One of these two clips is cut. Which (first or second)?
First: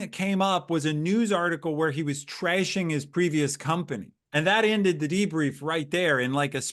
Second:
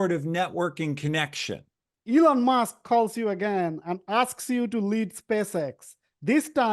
second